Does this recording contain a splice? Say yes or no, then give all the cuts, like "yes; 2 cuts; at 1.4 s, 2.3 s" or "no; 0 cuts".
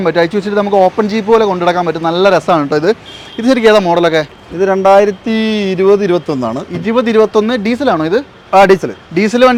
no; 0 cuts